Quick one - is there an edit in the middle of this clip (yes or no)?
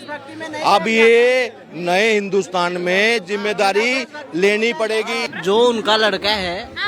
yes